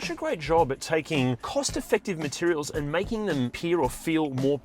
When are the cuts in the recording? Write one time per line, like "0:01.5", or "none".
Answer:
0:01.4
0:03.6